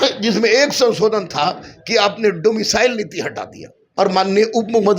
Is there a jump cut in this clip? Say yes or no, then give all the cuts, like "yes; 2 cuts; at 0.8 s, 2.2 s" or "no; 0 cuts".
yes; 1 cut; at 3.8 s